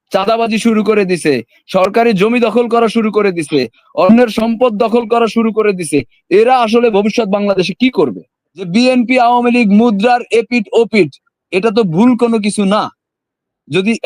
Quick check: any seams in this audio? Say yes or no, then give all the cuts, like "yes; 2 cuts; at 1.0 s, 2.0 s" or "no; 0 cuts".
yes; 1 cut; at 8.5 s